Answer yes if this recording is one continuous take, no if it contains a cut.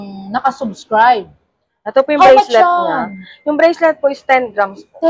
yes